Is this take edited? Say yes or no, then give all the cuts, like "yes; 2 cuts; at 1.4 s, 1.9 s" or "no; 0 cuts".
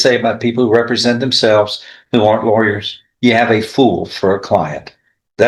no; 0 cuts